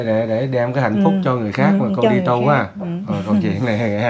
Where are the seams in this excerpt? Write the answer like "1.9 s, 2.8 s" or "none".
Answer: none